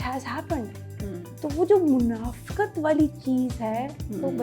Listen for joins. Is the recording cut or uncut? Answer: cut